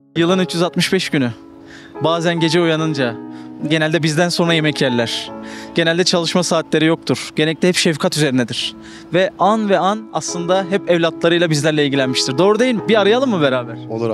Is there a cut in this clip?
yes; 1 cut; at 12.8 s

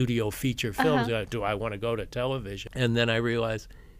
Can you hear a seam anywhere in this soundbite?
yes; 1 cut; at 2.6 s

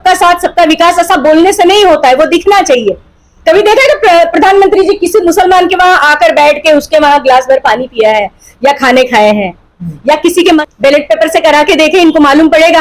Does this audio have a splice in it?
yes; 1 cut; at 10.6 s

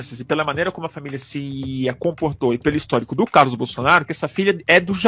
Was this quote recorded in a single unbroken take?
yes; 0 cuts

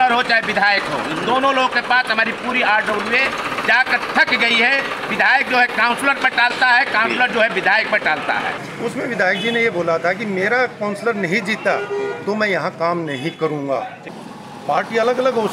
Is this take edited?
yes; 2 cuts; at 8.7 s, 14.1 s

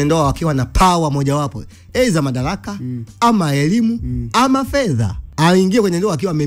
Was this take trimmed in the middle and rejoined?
yes; 1 cut; at 5.2 s

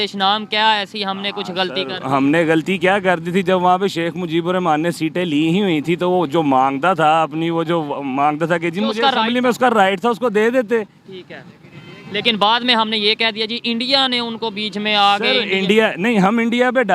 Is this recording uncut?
yes; 0 cuts

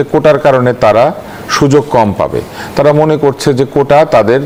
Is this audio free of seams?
yes; 0 cuts

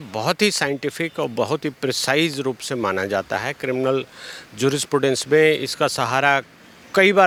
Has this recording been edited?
no; 0 cuts

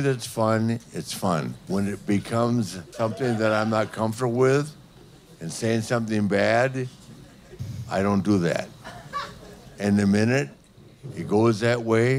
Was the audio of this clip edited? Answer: yes; 2 cuts; at 1.6 s, 2.8 s

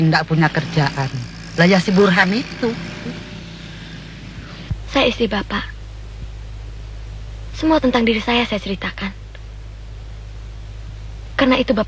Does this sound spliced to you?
yes; 1 cut; at 4.7 s

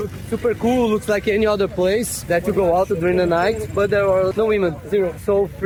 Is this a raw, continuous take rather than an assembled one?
yes; 0 cuts

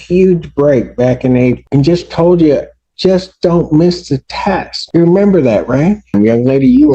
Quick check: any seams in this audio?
yes; 3 cuts; at 1.6 s, 4.8 s, 6.1 s

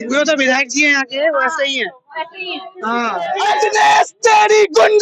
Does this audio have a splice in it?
yes; 1 cut; at 3.4 s

